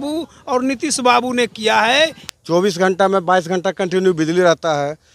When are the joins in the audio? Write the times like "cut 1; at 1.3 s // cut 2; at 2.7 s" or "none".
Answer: cut 1; at 2.2 s